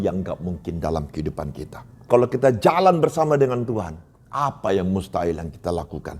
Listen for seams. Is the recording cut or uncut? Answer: cut